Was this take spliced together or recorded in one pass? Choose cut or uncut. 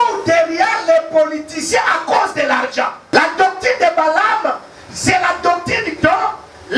cut